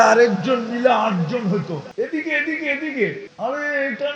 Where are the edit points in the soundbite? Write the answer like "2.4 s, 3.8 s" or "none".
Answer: 1.9 s, 3.3 s